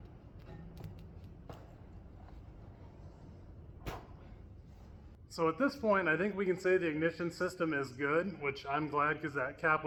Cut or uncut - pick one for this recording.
uncut